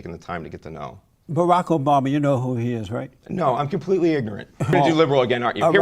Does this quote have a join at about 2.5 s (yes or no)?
no